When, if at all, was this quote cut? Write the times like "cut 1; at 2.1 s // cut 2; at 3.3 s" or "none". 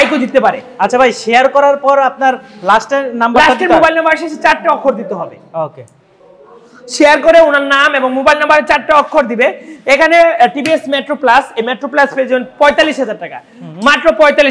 none